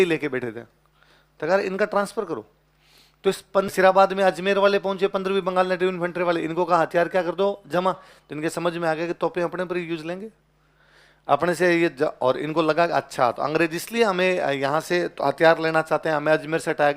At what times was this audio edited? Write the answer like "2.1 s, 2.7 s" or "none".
3.7 s